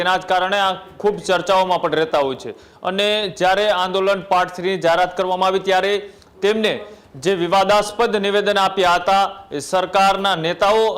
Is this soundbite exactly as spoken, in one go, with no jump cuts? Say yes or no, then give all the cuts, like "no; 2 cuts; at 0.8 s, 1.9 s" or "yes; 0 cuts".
yes; 0 cuts